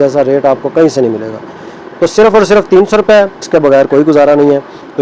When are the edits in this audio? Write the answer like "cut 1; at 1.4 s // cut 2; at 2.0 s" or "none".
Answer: cut 1; at 3.4 s